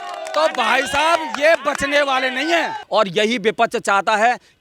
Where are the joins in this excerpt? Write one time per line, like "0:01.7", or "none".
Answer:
0:02.8